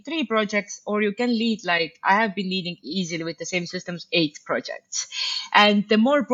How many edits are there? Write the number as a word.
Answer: zero